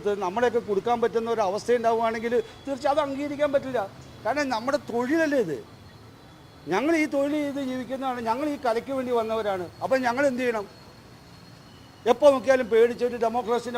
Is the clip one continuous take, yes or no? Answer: yes